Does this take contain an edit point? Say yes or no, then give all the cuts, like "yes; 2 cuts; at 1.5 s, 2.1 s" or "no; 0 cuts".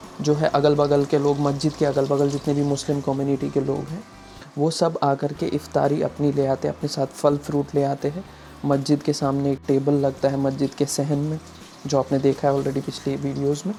no; 0 cuts